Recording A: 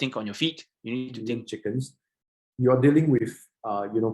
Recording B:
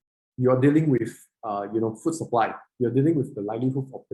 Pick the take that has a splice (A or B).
A